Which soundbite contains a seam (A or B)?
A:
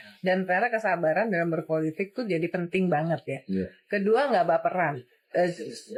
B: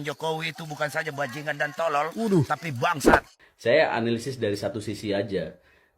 B